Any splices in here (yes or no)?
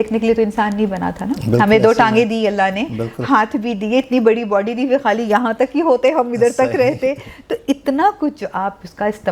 no